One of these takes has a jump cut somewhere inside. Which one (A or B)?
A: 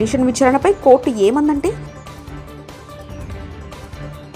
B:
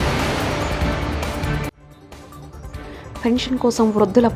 B